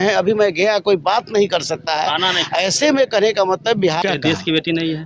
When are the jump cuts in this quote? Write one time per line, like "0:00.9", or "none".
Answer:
0:04.0